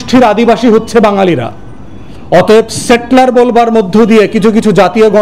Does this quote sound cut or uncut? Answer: uncut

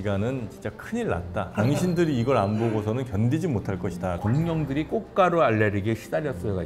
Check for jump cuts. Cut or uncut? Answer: cut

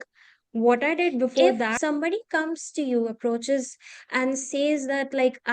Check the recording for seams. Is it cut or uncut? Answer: cut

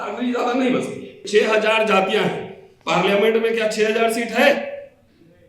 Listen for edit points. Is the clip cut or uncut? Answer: cut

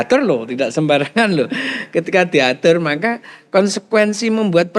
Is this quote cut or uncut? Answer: uncut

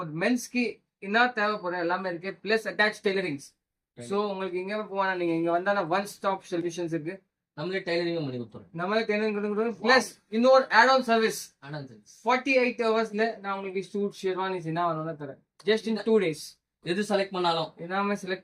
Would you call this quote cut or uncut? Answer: uncut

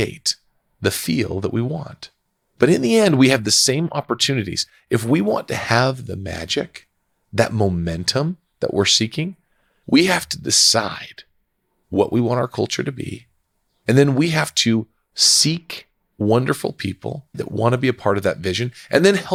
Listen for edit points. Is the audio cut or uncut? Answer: uncut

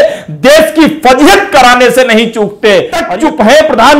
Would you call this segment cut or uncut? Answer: cut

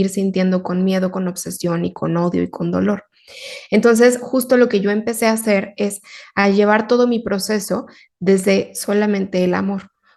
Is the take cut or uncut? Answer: uncut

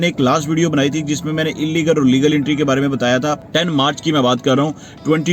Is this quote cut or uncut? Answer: cut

